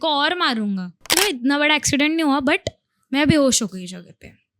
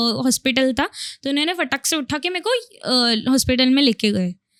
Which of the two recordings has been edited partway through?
first; 1 cut; at 1.1 s

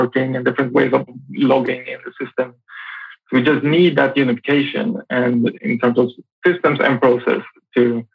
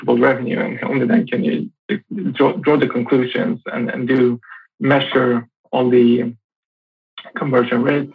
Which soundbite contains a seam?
first; 2 cuts; at 1.1 s, 5.6 s

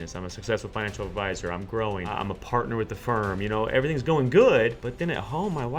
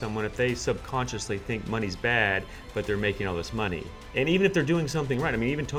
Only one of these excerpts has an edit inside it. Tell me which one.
first; 2 cuts; at 2.1 s, 4.8 s

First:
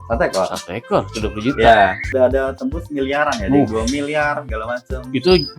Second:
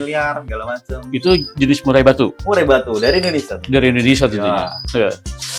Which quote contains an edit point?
first; 1 cut; at 2.1 s

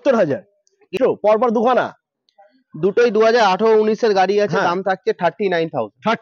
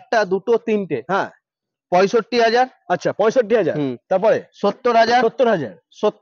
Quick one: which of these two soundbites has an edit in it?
first; 1 cut; at 0.9 s

